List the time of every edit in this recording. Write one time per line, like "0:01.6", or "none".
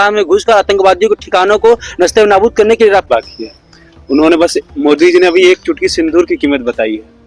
0:03.1